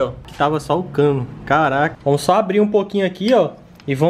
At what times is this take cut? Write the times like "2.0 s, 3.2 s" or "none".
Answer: 2.0 s